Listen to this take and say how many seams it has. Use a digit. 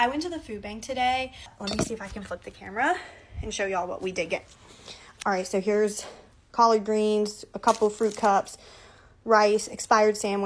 1